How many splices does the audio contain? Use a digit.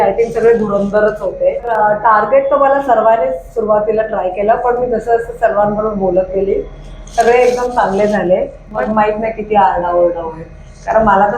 2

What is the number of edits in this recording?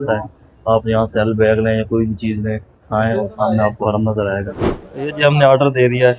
1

